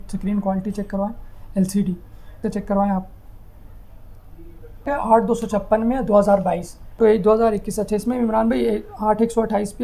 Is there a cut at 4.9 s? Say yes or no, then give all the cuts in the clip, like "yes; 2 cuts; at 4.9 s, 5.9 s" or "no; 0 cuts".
yes; 3 cuts; at 2.4 s, 4.9 s, 7.0 s